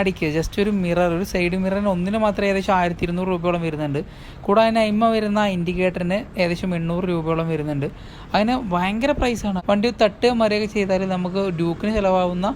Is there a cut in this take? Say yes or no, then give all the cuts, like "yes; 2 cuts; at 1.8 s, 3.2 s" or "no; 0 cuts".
yes; 1 cut; at 9.6 s